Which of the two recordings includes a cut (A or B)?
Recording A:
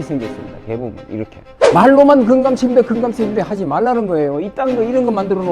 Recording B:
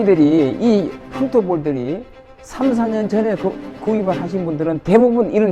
A